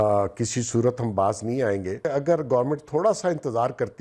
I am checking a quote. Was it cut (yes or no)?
yes